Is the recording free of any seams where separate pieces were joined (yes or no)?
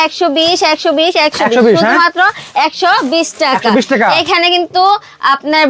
yes